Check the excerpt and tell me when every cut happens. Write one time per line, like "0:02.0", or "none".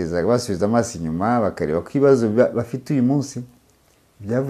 none